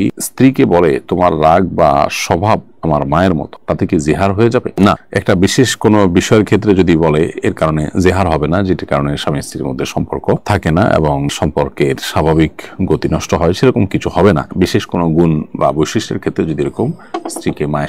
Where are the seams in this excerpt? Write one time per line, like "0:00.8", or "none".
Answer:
none